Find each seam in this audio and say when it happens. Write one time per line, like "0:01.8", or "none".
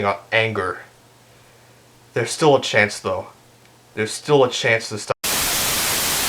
0:05.1